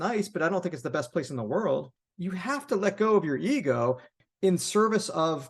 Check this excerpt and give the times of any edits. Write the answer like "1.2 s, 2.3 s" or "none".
2.0 s, 4.2 s